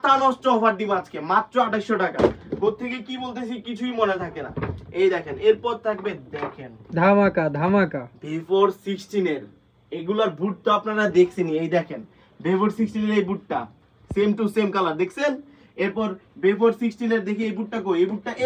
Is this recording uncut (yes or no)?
yes